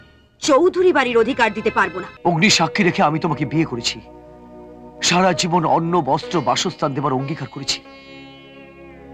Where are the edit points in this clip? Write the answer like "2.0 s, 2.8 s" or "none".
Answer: 2.0 s